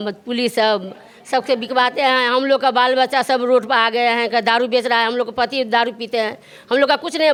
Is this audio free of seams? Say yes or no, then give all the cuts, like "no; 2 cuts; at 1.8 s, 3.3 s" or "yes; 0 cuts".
yes; 0 cuts